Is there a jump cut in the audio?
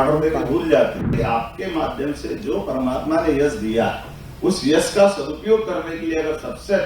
yes; 1 cut; at 1.1 s

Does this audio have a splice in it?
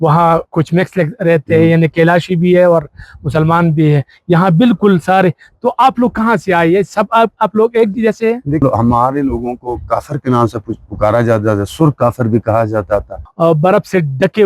yes; 2 cuts; at 8.6 s, 13.2 s

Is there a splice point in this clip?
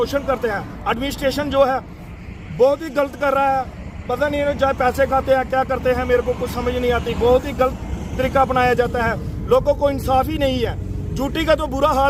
no; 0 cuts

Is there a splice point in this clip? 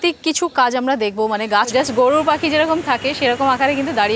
yes; 1 cut; at 1.8 s

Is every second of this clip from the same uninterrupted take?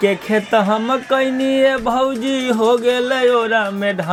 yes; 0 cuts

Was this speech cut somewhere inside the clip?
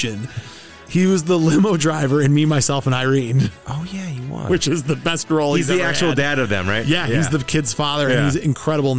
no; 0 cuts

